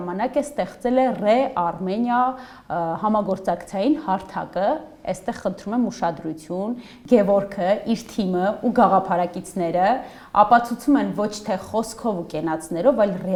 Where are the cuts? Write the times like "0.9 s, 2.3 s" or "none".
none